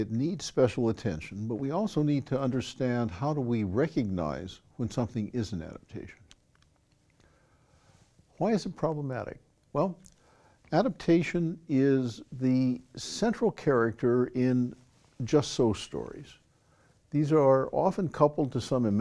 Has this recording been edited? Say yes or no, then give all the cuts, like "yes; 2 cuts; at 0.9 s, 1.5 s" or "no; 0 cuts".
yes; 1 cut; at 17.7 s